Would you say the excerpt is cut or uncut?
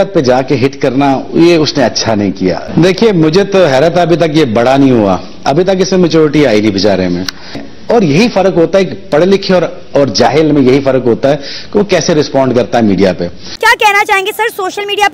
cut